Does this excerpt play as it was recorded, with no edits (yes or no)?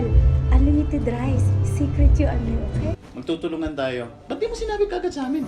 no